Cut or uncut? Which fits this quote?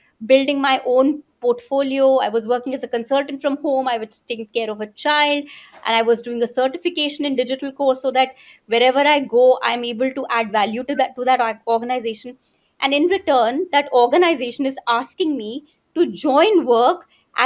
uncut